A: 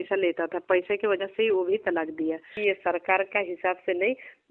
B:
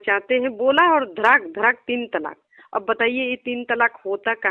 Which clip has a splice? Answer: A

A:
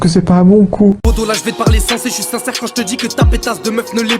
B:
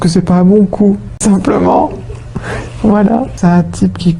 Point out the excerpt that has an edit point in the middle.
A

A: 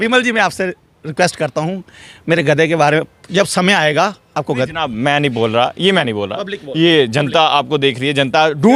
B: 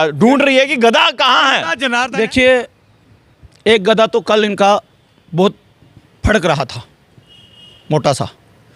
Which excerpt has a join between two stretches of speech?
B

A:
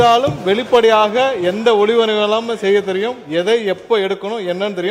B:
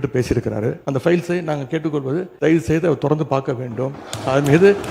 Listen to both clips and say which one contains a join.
B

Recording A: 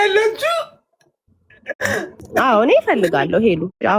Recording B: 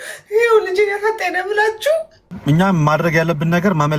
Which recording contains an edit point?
B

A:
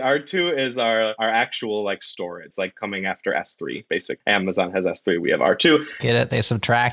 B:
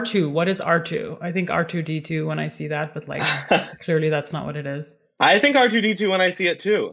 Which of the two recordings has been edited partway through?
A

